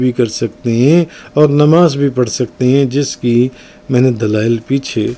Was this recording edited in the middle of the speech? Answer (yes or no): no